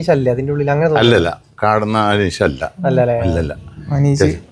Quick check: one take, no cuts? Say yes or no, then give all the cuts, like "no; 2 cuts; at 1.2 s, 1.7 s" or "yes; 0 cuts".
yes; 0 cuts